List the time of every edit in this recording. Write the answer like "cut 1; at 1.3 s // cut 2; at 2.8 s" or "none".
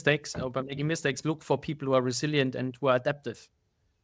cut 1; at 1.2 s